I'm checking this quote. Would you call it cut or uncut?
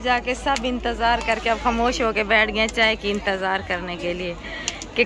uncut